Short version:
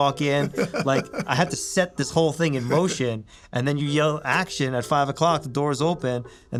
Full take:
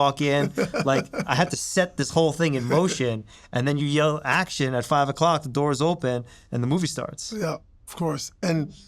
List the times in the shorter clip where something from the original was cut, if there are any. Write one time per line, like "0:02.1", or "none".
none